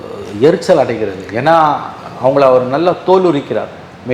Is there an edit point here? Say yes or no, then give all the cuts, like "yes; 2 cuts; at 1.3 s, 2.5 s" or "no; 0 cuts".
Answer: no; 0 cuts